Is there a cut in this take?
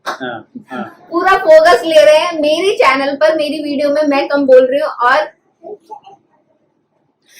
yes; 1 cut; at 1.0 s

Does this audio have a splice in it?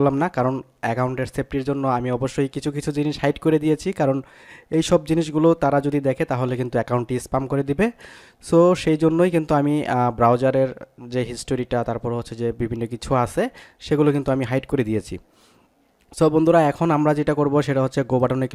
no; 0 cuts

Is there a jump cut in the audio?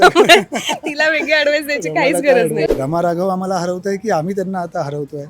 yes; 1 cut; at 2.7 s

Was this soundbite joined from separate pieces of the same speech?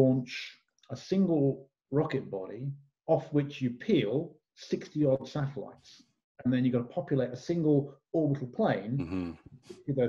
no; 0 cuts

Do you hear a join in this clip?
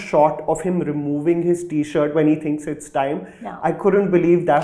no; 0 cuts

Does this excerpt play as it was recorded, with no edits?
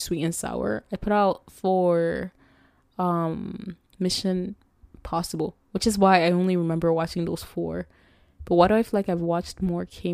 yes; 0 cuts

